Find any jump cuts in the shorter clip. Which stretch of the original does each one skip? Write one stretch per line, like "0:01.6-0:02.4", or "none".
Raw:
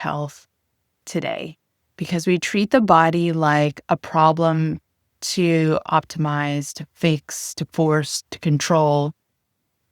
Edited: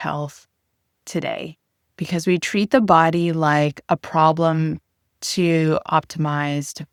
none